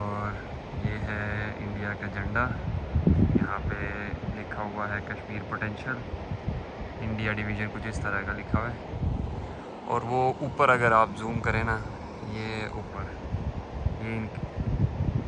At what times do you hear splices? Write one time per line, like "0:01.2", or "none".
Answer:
none